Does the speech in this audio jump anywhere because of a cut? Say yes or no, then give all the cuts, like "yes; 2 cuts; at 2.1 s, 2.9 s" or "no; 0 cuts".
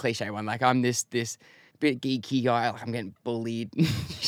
no; 0 cuts